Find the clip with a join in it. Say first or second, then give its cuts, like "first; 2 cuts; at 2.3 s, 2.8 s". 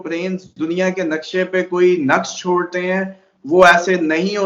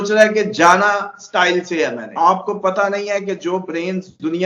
second; 1 cut; at 2.0 s